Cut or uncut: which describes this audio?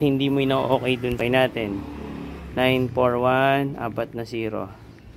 cut